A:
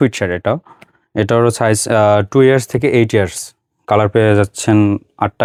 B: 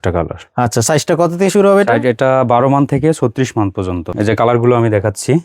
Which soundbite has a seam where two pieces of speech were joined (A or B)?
B